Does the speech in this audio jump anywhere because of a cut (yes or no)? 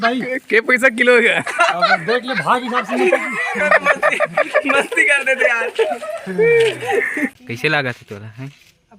yes